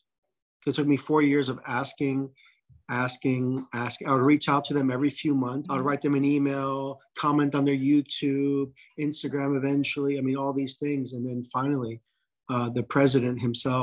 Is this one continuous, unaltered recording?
no; 1 cut; at 5.6 s

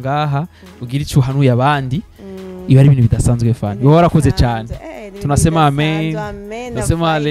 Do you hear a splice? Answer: no; 0 cuts

